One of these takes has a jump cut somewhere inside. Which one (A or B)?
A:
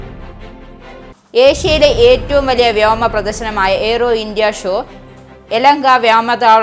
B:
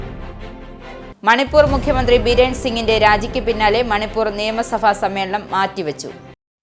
A